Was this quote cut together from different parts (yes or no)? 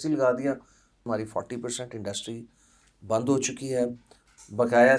yes